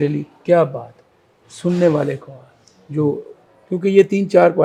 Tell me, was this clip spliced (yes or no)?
no